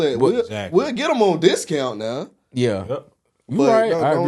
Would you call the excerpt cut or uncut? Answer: uncut